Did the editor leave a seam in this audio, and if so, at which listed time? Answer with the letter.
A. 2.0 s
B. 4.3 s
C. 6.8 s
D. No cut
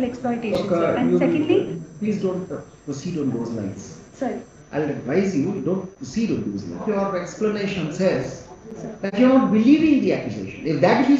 C